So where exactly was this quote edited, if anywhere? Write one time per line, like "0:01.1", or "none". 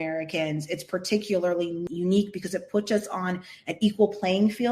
0:01.8